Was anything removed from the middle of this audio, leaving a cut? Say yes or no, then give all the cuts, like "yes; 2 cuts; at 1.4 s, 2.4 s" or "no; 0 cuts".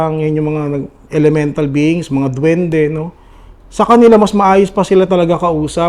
no; 0 cuts